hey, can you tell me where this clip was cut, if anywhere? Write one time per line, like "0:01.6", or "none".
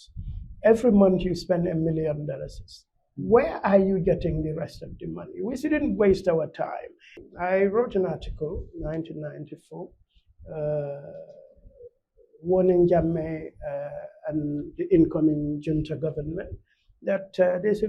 0:07.2